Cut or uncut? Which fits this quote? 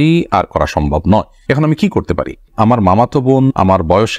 cut